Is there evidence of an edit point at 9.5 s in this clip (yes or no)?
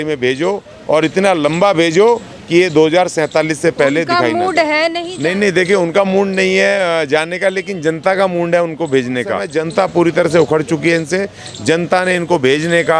yes